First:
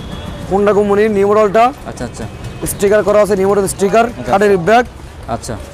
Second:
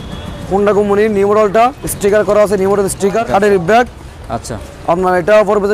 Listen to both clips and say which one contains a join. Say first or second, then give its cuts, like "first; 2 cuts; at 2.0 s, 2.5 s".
second; 2 cuts; at 1.9 s, 3.2 s